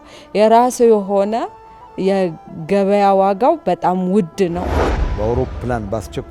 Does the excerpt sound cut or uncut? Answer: cut